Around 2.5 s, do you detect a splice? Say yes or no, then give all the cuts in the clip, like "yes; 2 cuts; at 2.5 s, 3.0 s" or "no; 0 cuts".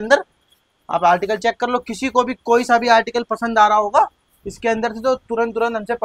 no; 0 cuts